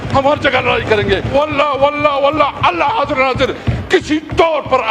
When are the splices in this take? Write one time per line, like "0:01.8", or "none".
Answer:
0:01.3